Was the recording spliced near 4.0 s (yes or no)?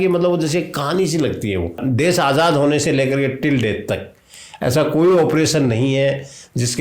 no